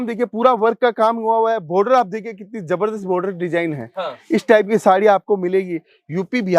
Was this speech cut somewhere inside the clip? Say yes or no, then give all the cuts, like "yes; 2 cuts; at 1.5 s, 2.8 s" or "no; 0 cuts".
no; 0 cuts